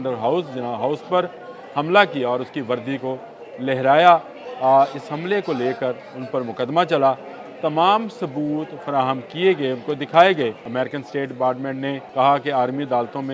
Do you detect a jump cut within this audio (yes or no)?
yes